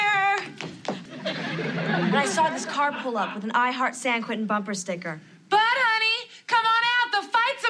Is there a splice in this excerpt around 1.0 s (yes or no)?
yes